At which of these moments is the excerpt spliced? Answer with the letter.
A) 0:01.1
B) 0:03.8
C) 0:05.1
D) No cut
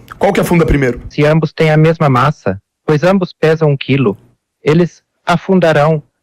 A